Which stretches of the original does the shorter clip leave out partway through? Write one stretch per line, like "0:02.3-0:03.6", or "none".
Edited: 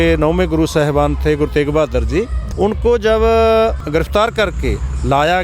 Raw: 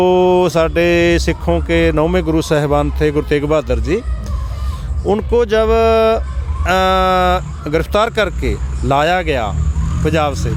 0:04.2-0:04.9
0:06.3-0:07.6